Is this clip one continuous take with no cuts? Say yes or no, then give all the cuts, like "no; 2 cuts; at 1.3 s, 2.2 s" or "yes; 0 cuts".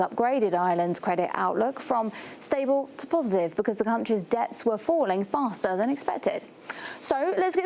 no; 1 cut; at 6.4 s